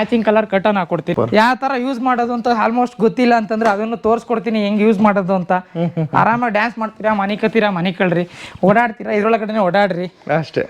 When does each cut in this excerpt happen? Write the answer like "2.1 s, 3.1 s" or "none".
1.1 s